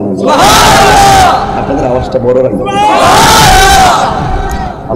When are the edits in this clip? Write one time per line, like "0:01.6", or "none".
none